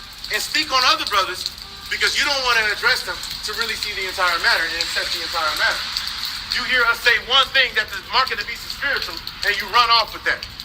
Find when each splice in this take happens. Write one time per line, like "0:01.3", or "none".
0:00.9